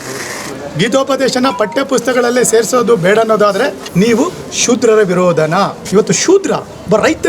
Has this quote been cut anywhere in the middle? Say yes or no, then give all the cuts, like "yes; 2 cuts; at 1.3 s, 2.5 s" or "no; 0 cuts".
yes; 2 cuts; at 3.8 s, 5.8 s